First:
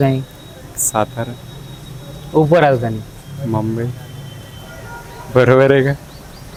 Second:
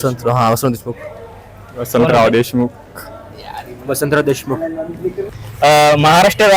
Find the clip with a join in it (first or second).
second